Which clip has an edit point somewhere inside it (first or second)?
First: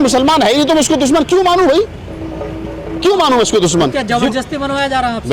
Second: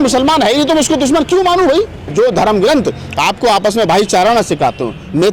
second